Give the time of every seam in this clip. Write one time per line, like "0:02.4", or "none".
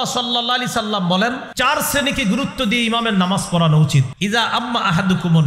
0:01.5
0:04.1